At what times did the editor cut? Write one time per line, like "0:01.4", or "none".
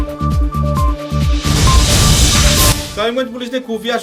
none